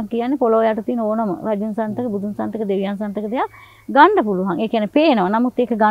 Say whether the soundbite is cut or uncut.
uncut